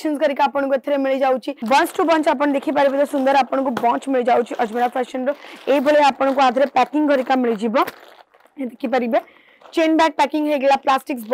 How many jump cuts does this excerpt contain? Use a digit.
1